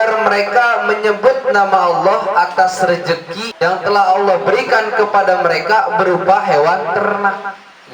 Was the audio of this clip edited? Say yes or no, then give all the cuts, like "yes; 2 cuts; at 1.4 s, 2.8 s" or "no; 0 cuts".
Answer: yes; 1 cut; at 3.4 s